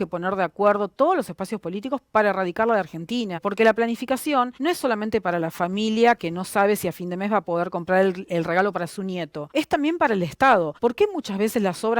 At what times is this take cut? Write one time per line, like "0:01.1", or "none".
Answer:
0:03.5
0:04.5
0:09.4
0:10.7